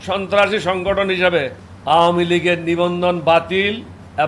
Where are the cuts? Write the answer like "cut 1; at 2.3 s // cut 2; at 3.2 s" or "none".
none